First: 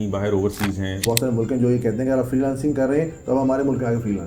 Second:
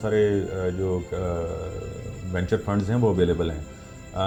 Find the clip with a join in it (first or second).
first